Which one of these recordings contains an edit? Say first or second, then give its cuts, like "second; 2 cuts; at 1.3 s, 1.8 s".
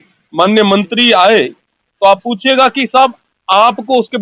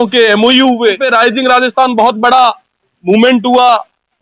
second; 1 cut; at 1.0 s